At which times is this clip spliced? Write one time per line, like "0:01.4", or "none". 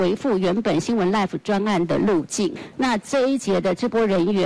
0:02.6